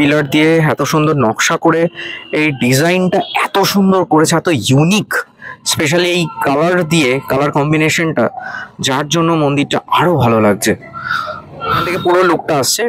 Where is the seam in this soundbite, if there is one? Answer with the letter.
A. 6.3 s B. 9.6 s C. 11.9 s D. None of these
C